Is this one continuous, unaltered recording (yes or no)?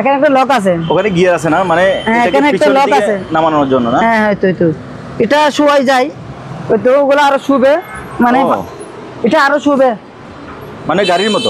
yes